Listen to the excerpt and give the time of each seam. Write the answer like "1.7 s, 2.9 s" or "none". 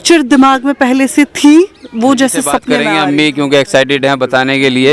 2.7 s

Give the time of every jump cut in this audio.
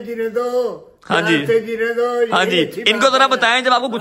none

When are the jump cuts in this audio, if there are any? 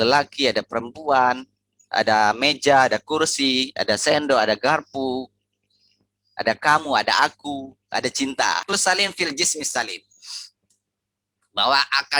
8.6 s

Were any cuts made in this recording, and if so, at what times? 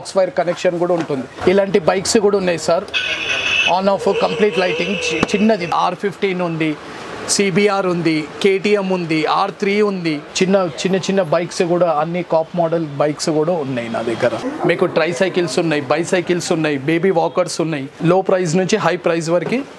1.3 s, 5.7 s, 10.3 s, 14.5 s, 17.9 s

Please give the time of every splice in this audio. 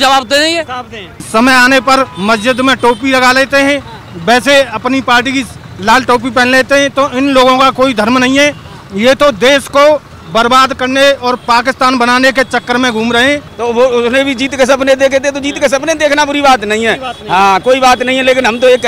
1.2 s, 13.5 s

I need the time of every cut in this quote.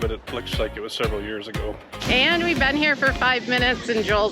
2.0 s

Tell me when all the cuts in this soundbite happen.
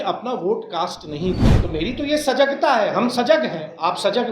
1.5 s

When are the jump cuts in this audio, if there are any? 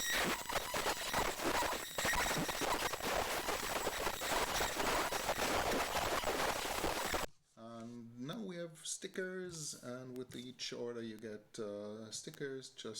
7.2 s

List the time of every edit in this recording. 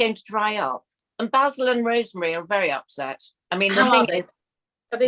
1.0 s

